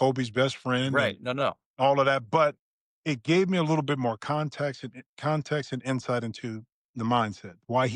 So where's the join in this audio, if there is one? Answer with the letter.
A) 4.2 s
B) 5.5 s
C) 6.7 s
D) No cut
D